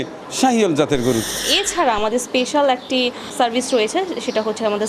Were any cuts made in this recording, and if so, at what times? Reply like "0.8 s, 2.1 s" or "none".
1.5 s, 3.3 s